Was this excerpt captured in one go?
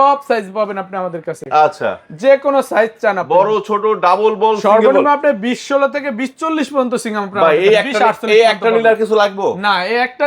yes; 0 cuts

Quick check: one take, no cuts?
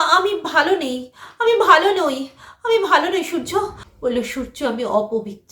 no; 1 cut; at 3.8 s

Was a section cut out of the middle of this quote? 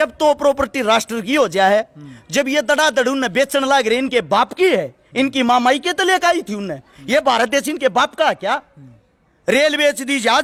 no; 0 cuts

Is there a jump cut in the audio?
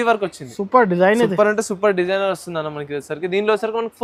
no; 0 cuts

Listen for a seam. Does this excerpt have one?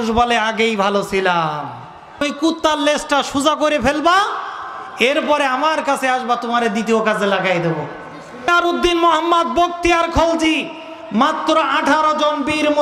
yes; 2 cuts; at 2.2 s, 8.5 s

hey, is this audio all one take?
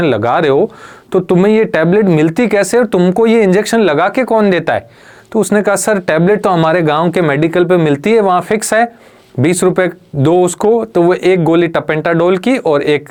yes; 0 cuts

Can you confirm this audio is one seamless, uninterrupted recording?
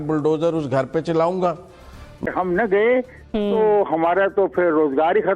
no; 1 cut; at 2.3 s

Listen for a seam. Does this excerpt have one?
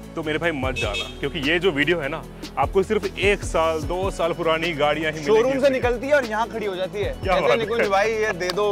no; 0 cuts

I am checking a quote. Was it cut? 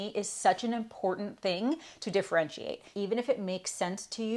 yes; 1 cut; at 2.9 s

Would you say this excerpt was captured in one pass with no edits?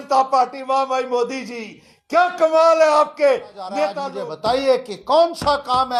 no; 1 cut; at 4.1 s

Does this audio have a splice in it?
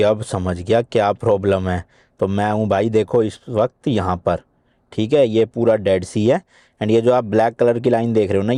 no; 0 cuts

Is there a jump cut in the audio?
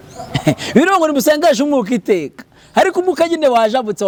no; 0 cuts

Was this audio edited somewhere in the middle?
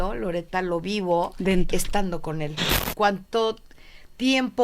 yes; 1 cut; at 2.8 s

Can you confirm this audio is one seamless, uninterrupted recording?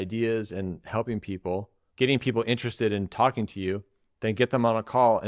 no; 1 cut; at 1.8 s

